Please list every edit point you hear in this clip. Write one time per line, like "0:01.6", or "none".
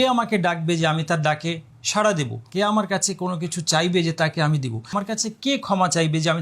0:02.4
0:04.9